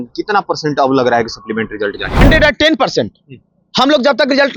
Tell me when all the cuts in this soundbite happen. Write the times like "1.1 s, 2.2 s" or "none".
2.1 s